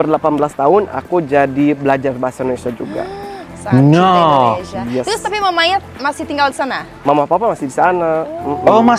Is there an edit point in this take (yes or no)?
no